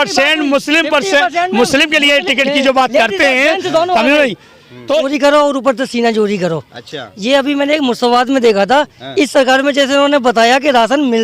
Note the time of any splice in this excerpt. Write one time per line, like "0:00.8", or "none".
0:05.1